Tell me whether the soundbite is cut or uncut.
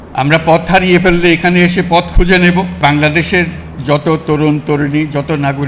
cut